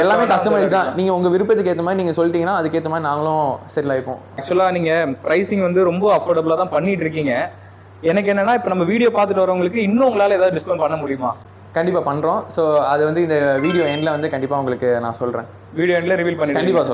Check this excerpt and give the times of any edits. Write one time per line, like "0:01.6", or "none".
0:04.4
0:11.4